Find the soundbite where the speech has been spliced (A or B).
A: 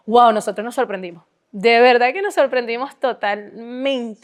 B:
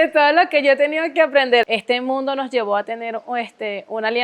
B